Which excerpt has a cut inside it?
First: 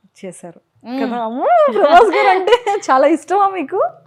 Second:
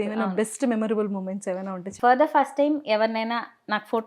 second; 1 cut; at 1.8 s

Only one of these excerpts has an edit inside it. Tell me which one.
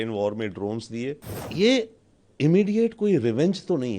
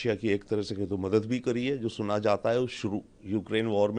first; 1 cut; at 1.3 s

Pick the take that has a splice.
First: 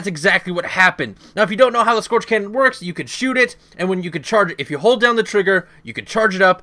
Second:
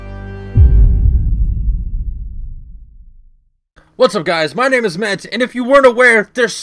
first; 1 cut; at 1.5 s

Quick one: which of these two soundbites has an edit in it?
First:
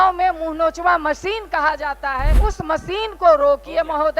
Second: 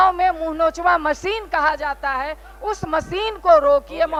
first; 1 cut; at 2.3 s

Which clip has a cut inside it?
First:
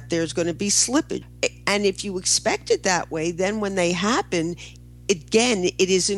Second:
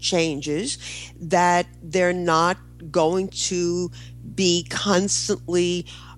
first; 1 cut; at 1.2 s

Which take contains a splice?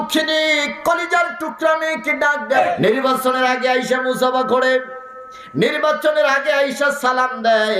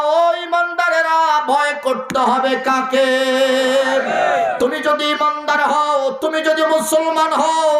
first; 1 cut; at 2.6 s

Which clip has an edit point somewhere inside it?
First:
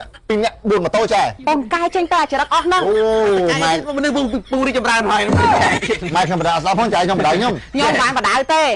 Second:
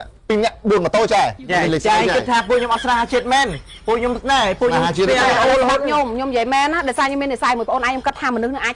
first; 1 cut; at 1.4 s

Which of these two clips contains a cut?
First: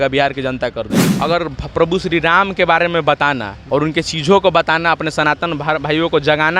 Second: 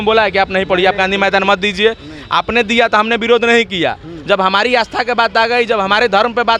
first; 2 cuts; at 1.1 s, 3.5 s

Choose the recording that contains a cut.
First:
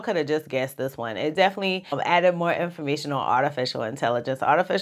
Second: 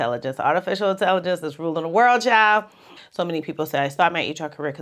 second; 1 cut; at 2.9 s

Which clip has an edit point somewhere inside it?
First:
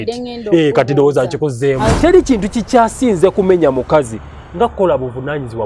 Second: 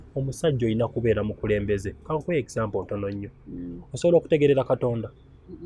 first; 1 cut; at 1.9 s

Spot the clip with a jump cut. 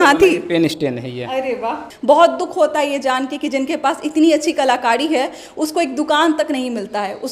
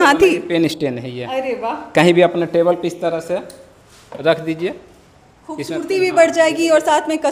first; 1 cut; at 1.8 s

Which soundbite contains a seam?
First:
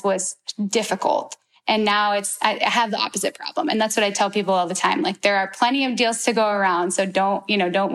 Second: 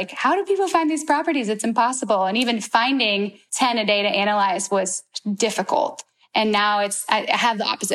second; 1 cut; at 3.4 s

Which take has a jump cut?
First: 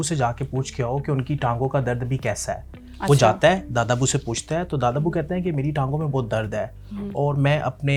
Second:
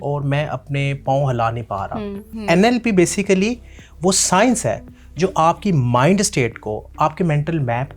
second; 1 cut; at 2.3 s

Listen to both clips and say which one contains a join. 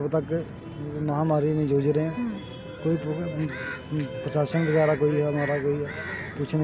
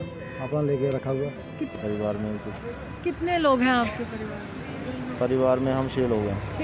second; 1 cut; at 1.7 s

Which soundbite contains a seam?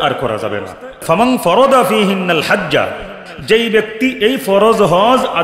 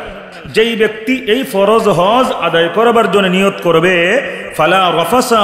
first; 1 cut; at 1.0 s

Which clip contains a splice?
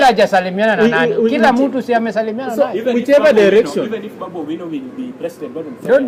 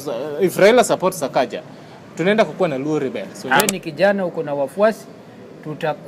second; 1 cut; at 3.6 s

